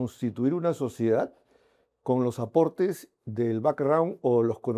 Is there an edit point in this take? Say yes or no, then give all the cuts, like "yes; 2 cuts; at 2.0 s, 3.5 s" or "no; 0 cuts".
no; 0 cuts